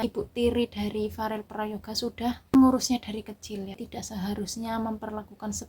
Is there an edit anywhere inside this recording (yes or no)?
yes